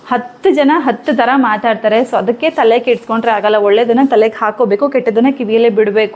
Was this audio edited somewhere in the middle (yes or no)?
no